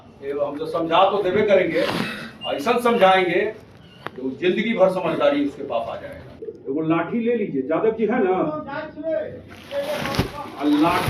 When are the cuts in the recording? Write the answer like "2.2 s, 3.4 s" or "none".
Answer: 6.6 s